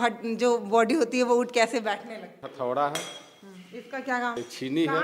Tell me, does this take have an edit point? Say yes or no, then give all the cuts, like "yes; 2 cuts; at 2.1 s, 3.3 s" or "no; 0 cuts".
yes; 2 cuts; at 2.4 s, 4.4 s